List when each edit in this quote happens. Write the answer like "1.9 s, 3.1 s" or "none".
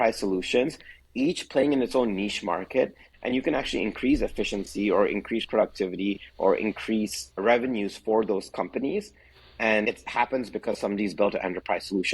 3.1 s, 9.8 s